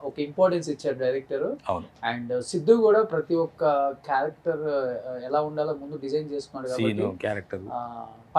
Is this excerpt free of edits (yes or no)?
yes